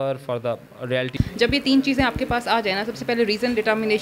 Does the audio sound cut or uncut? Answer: cut